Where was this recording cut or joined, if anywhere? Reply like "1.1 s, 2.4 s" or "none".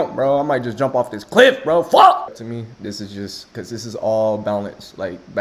2.3 s